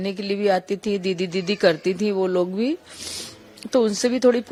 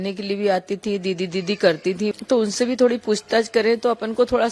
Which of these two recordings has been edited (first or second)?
second